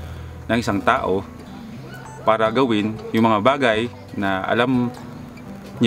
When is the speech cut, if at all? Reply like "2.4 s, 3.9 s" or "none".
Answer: none